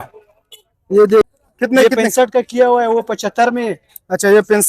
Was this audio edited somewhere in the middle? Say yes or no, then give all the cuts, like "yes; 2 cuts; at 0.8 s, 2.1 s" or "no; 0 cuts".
yes; 1 cut; at 1.2 s